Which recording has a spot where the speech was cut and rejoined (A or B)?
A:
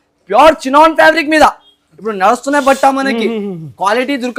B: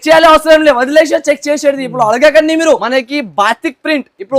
B